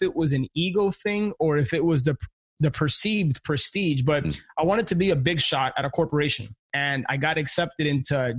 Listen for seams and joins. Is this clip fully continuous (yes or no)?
no